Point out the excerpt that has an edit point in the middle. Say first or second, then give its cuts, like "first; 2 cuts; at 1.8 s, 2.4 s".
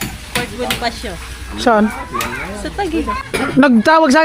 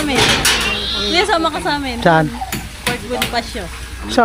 first; 1 cut; at 3.2 s